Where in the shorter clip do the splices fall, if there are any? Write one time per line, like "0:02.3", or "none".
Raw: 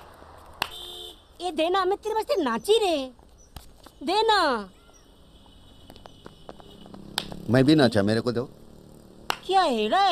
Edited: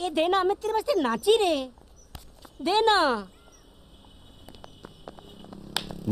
none